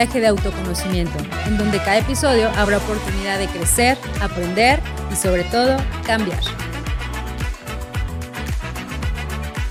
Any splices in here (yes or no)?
no